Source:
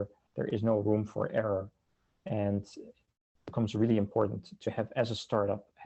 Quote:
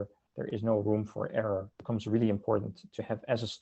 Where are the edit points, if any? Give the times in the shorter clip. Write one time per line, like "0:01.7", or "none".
0:01.7